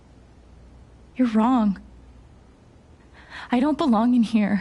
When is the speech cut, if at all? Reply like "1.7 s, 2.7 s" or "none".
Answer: 1.1 s, 1.9 s, 3.3 s